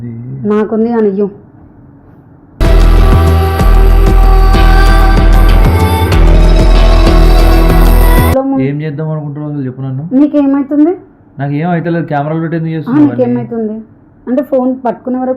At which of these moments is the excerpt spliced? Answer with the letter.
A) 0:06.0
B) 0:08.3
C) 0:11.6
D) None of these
B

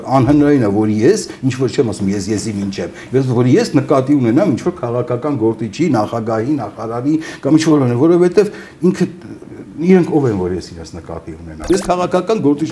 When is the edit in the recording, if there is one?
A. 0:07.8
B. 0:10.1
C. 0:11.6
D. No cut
C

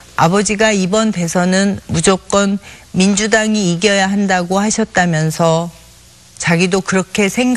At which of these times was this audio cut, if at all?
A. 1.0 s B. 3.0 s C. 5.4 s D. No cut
B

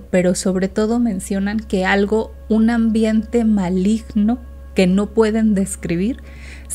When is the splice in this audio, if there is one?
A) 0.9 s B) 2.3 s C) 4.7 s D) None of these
B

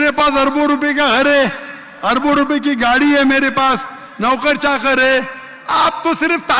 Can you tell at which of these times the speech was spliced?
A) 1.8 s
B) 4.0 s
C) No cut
C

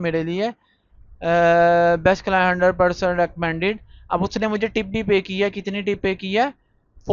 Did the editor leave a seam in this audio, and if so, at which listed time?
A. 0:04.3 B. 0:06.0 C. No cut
C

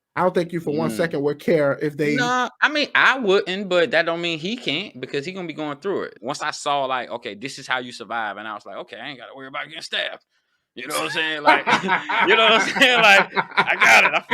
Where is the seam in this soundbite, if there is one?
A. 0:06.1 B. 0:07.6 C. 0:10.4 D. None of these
A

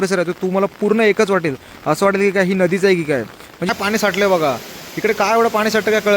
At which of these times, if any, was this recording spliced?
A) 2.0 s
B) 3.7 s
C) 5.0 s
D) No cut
B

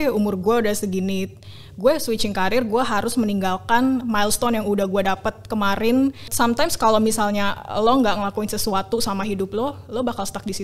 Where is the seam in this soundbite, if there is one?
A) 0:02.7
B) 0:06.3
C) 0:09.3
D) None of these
B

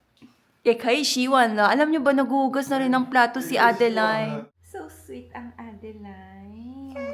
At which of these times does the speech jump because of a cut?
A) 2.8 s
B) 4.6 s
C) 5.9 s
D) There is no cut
B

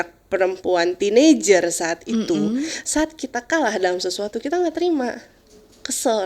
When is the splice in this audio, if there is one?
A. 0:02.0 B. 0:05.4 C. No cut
C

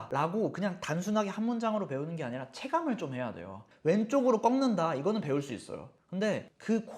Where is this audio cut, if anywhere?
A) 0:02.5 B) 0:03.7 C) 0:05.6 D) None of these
B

